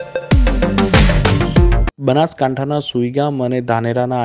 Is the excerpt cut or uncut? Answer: uncut